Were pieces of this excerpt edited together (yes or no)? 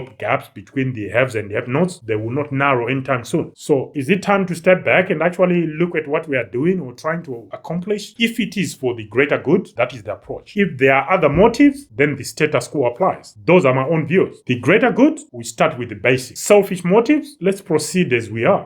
yes